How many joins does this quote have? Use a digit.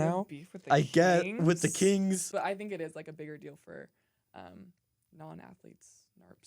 1